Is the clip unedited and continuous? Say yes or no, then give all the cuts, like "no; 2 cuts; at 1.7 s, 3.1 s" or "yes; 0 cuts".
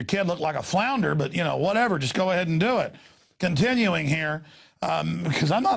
yes; 0 cuts